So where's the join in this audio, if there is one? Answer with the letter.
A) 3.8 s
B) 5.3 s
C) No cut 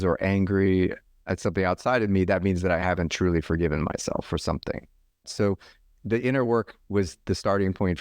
B